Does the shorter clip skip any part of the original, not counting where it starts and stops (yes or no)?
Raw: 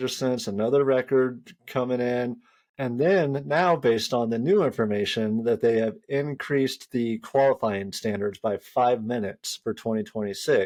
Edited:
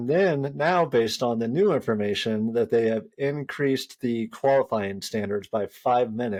no